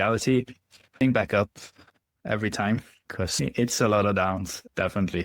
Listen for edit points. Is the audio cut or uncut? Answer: cut